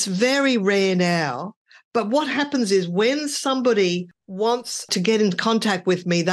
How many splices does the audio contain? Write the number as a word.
one